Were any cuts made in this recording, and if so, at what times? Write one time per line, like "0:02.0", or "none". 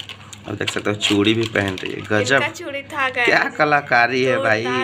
none